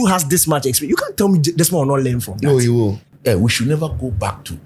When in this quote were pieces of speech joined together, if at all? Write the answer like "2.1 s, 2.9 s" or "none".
3.0 s